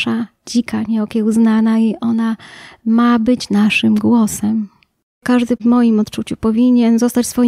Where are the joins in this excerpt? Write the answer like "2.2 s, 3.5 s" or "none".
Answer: 5.3 s